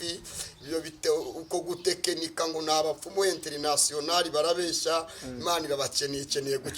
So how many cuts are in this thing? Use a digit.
0